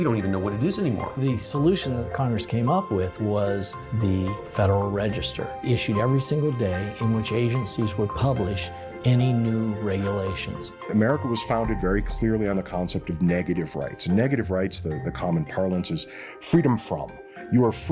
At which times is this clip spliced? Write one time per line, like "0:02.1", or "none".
0:01.2
0:05.5
0:10.9